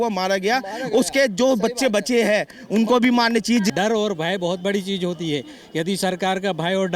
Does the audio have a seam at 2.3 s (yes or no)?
no